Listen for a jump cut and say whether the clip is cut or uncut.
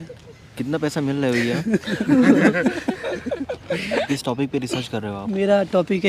cut